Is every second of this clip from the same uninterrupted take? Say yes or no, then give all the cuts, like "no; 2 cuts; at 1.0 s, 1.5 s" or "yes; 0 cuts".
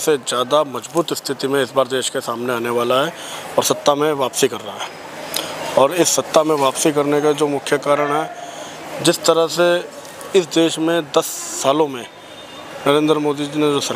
yes; 0 cuts